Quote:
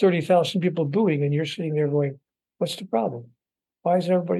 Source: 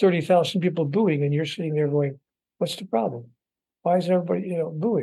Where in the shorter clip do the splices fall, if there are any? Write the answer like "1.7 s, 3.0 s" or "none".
none